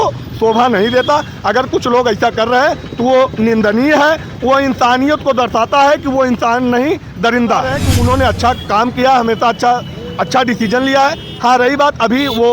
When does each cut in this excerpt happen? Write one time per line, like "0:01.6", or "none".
0:07.8